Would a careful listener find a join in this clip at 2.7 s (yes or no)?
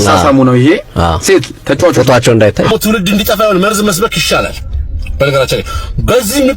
yes